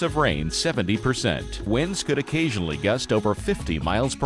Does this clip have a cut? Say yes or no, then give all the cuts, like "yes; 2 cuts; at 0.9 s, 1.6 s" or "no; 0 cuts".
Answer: no; 0 cuts